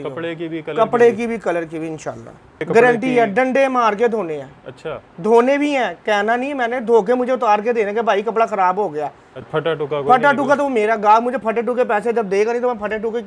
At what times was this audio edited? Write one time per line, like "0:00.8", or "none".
0:02.6
0:09.5